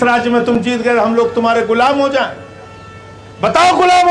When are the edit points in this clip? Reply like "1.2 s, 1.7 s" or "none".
none